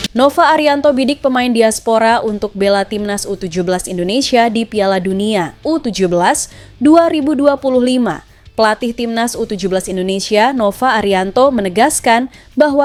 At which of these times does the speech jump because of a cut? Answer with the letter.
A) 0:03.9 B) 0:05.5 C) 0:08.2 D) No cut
D